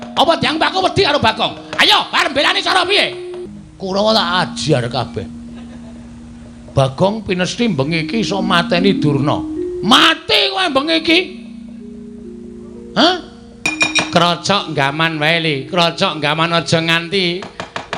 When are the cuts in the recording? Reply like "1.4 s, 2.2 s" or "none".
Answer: 3.4 s, 13.7 s